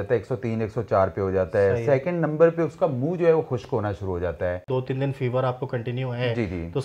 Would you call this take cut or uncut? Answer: cut